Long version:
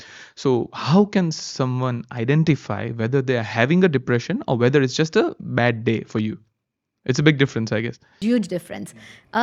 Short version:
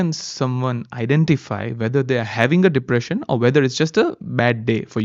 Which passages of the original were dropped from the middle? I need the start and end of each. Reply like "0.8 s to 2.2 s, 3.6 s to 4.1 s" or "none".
none

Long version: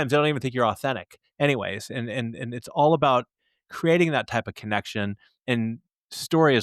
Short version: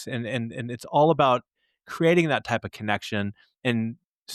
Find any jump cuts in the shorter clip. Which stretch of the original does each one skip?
none

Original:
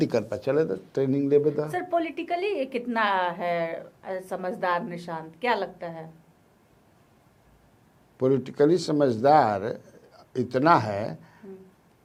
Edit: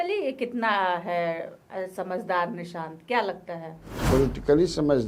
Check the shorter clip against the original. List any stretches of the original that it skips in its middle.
6.5 s to 8.2 s

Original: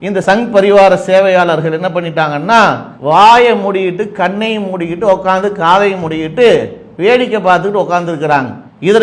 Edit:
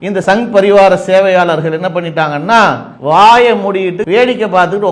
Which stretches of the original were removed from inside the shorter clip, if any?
4.0 s to 6.9 s

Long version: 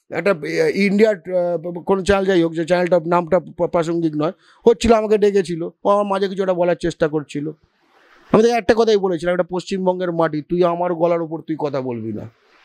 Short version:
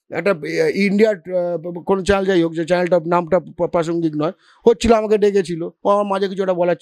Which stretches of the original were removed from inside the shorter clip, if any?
none

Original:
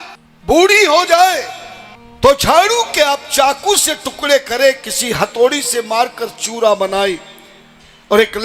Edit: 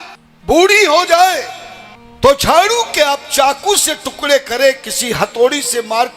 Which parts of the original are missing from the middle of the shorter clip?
none

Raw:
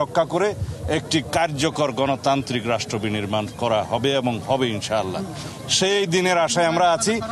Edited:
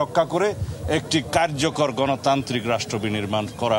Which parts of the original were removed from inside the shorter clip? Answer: none

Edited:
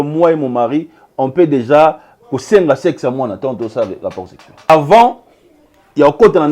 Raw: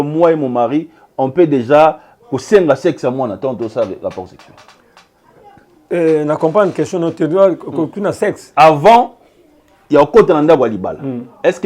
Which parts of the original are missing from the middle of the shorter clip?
4.7 s to 8.6 s

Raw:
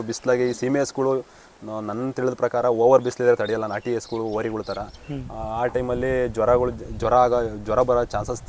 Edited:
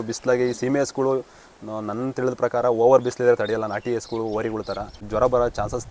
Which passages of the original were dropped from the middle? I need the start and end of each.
5.0 s to 7.6 s

